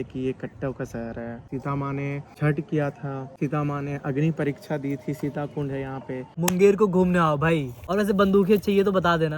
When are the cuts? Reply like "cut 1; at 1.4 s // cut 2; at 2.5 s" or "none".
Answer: cut 1; at 1.9 s // cut 2; at 3.3 s // cut 3; at 6.2 s // cut 4; at 7.8 s